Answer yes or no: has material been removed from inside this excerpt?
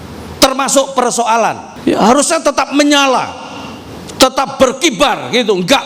yes